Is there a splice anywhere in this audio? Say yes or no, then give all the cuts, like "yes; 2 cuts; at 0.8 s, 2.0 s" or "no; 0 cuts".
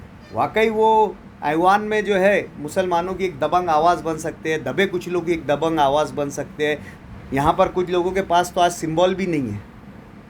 yes; 1 cut; at 7.0 s